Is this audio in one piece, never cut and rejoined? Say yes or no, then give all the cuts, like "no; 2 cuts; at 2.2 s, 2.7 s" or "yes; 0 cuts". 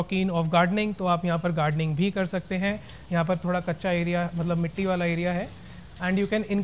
yes; 0 cuts